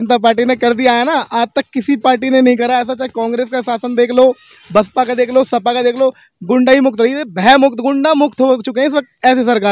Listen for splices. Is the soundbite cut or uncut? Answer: uncut